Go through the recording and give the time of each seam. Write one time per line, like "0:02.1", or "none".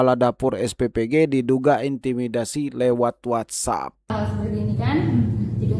0:04.1

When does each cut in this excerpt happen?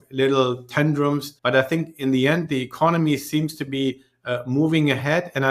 0:01.3

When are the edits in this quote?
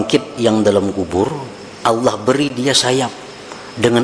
none

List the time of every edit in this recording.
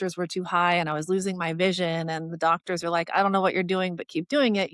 none

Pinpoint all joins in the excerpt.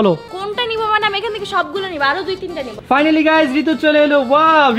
0:02.7

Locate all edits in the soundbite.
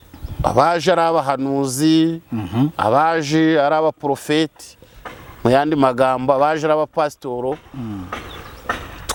none

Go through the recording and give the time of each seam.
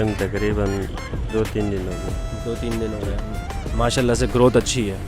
none

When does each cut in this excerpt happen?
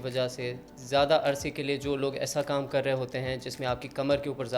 none

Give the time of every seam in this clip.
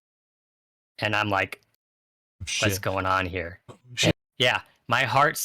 0:04.1

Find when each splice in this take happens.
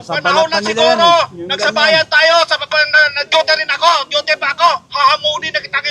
none

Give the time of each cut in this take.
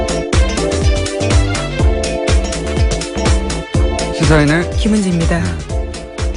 0:05.0

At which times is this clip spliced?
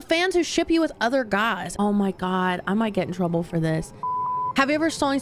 0:01.7
0:04.0

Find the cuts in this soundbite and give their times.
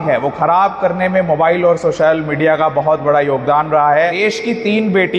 0:04.2

